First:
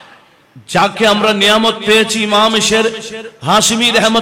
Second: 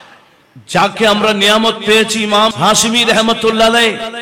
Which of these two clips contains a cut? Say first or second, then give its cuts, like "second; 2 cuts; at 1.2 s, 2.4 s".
second; 1 cut; at 2.5 s